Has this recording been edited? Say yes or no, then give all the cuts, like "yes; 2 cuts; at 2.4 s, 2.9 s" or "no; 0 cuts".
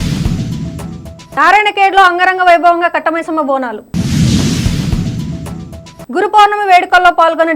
yes; 1 cut; at 1.2 s